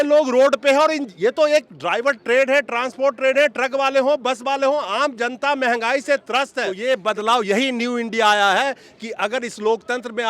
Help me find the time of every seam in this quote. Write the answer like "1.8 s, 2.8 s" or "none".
6.6 s